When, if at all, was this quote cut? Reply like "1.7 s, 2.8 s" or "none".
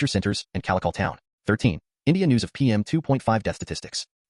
1.2 s